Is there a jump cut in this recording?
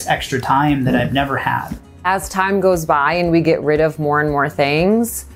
yes; 1 cut; at 1.8 s

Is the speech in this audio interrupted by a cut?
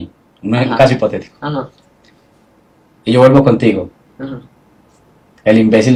no; 0 cuts

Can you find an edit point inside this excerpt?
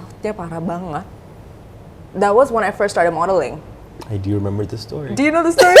no; 0 cuts

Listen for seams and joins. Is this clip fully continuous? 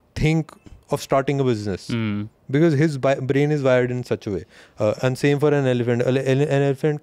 yes; 0 cuts

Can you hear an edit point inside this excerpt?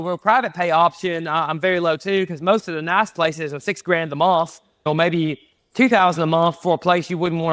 yes; 1 cut; at 4.8 s

